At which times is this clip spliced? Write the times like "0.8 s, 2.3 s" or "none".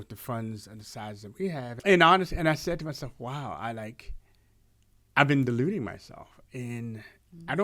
1.7 s

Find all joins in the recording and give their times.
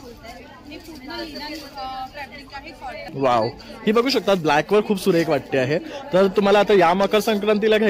3.1 s

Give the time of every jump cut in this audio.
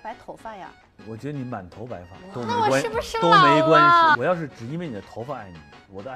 2.1 s, 4.2 s

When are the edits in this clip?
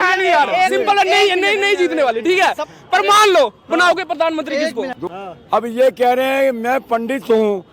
5.0 s

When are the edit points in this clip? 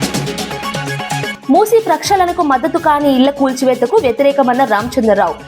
1.3 s

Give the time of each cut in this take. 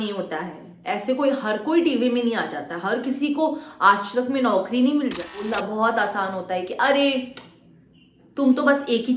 5.5 s

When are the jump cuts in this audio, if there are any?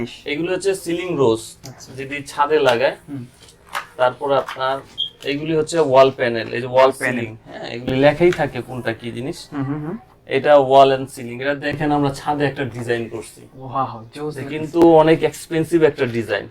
none

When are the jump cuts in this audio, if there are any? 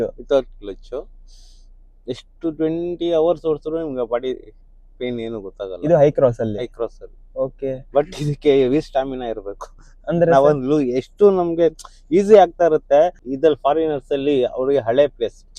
13.2 s

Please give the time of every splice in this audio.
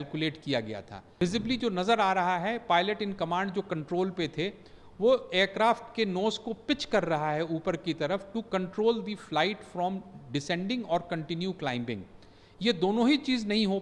1.2 s

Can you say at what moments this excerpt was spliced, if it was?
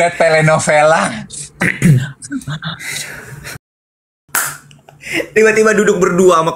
3.6 s

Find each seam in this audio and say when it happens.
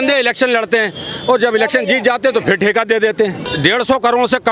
3.5 s

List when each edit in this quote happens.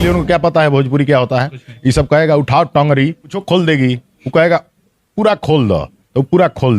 3.4 s

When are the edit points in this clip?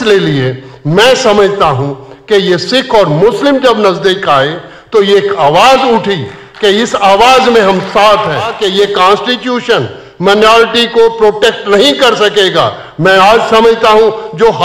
8.6 s

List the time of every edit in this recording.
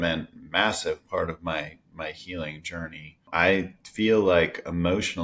3.3 s

